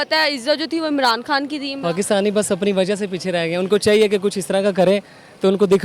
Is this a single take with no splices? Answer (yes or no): no